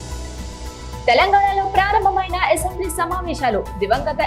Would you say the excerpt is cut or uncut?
cut